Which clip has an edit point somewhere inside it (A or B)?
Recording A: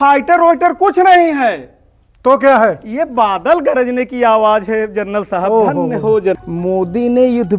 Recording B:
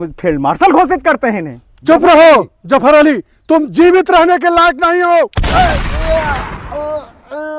A